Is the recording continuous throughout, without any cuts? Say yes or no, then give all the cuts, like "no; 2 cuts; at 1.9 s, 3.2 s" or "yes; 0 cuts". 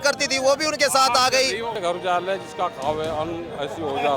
no; 1 cut; at 1.8 s